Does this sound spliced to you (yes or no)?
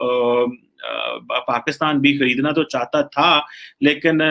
no